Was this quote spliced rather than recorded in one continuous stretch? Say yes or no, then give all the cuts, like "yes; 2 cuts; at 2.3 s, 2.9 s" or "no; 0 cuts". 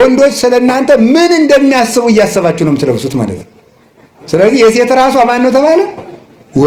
no; 0 cuts